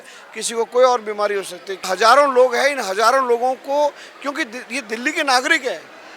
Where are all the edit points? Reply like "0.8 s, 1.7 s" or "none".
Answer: 1.9 s